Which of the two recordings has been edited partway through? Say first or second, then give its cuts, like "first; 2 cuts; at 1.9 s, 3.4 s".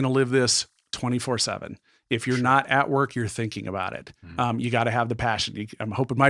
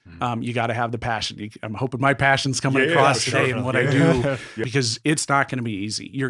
second; 1 cut; at 4.6 s